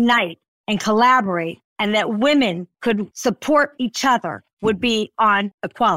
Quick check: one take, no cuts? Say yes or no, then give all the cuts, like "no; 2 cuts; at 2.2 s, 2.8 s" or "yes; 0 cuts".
yes; 0 cuts